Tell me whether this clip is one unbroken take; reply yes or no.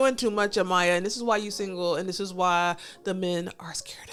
yes